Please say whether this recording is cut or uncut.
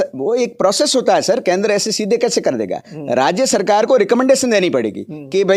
uncut